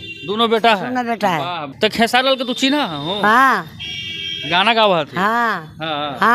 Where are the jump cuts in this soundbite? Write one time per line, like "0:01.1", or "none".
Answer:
none

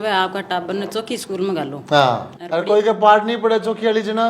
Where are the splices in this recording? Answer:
0:02.3

